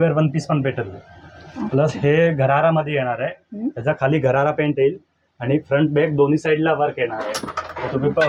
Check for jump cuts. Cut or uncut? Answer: uncut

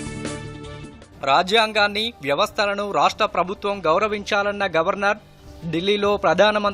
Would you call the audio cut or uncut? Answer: cut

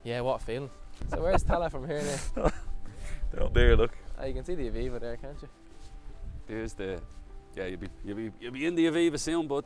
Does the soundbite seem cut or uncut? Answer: cut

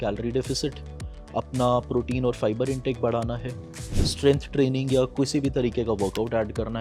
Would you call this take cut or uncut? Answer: uncut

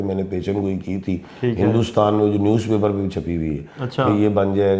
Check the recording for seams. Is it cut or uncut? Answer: uncut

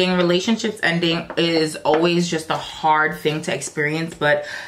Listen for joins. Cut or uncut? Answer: uncut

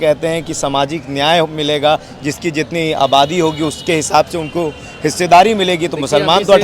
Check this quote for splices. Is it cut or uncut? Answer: uncut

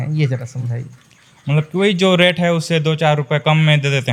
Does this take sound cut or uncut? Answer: uncut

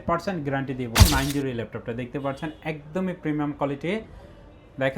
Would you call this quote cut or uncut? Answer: cut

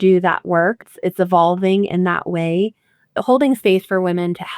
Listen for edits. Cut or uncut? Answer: cut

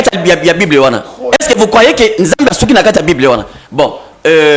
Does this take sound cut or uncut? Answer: uncut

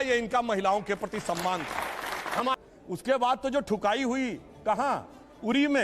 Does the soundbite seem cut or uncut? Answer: cut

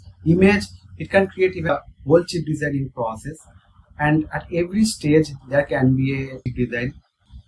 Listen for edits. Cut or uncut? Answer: cut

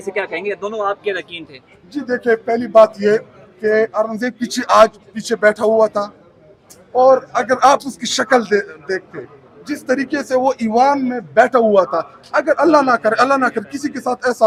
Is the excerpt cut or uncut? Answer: uncut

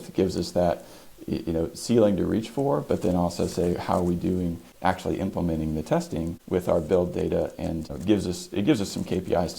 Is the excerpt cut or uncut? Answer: cut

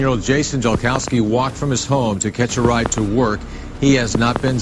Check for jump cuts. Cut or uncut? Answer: uncut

